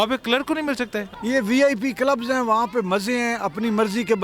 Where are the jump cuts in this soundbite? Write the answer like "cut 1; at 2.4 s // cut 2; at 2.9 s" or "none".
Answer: cut 1; at 1.1 s